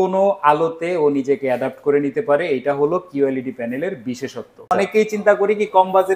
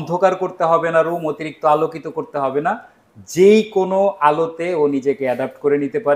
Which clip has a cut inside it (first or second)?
first